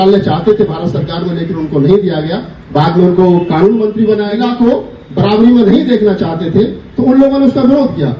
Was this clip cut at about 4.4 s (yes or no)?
yes